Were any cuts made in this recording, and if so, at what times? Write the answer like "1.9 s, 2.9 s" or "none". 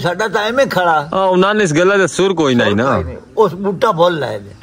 none